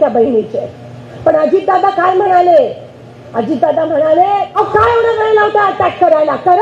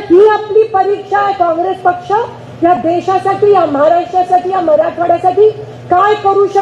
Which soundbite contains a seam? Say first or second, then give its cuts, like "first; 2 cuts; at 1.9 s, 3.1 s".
first; 1 cut; at 4.6 s